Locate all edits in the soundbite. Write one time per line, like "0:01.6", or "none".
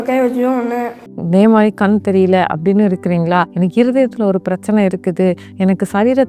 0:01.0
0:03.5